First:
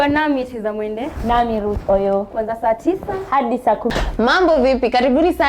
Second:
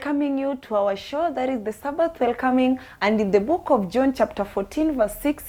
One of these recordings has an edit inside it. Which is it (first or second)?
first